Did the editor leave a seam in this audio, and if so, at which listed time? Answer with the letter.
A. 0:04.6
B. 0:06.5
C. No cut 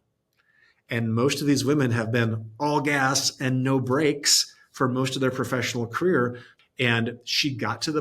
B